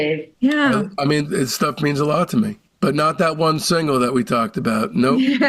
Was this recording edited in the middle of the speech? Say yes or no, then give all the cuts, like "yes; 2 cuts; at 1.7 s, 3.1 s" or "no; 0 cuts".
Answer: yes; 1 cut; at 1.3 s